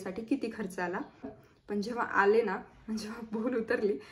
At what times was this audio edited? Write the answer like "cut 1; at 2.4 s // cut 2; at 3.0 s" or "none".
cut 1; at 1.4 s